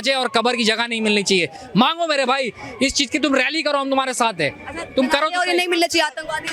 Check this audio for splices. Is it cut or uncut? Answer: uncut